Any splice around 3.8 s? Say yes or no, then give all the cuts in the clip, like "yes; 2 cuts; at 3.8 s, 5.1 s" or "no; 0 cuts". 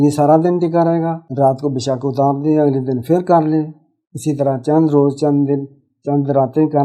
no; 1 cut; at 1.2 s